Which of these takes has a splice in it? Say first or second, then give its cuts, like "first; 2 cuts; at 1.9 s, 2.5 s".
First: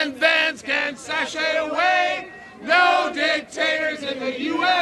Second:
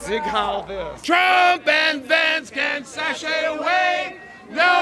second; 1 cut; at 0.9 s